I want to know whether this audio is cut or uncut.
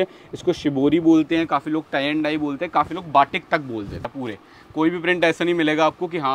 cut